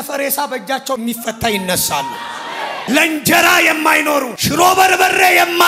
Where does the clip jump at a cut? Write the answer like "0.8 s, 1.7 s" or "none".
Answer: 1.0 s, 2.8 s, 4.4 s